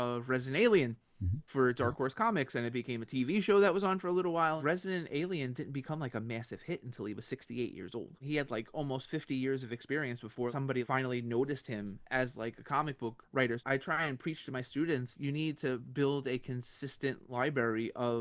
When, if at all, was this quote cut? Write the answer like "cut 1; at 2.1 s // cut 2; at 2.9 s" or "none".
cut 1; at 4.6 s // cut 2; at 8.2 s // cut 3; at 10.7 s // cut 4; at 13.6 s // cut 5; at 15.1 s